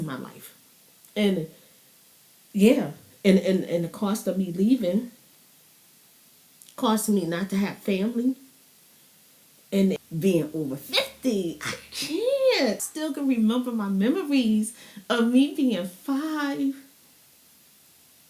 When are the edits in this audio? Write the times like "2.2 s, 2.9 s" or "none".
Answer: 10.0 s, 12.8 s

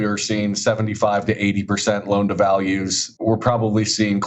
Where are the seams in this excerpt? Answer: 3.1 s

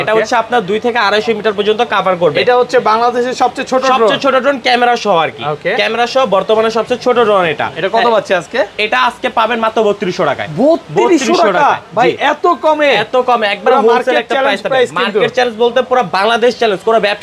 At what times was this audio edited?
none

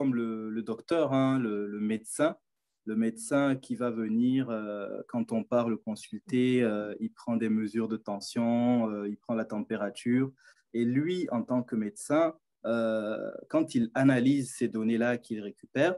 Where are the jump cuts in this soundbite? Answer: none

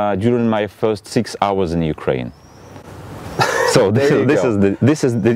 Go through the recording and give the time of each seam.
none

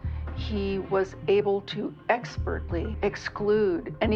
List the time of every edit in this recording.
2.9 s

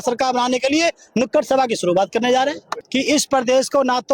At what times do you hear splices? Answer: 2.7 s

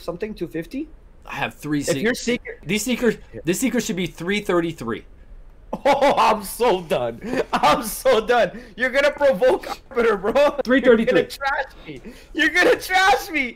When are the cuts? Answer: 2.6 s

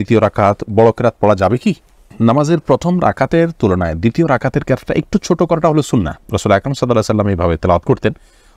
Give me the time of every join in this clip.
none

